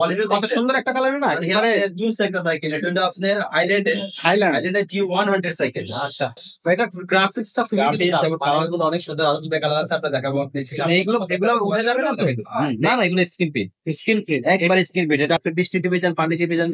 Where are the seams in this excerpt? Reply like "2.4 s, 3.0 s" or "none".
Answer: none